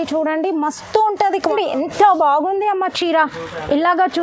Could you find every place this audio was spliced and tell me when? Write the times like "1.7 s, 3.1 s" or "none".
1.5 s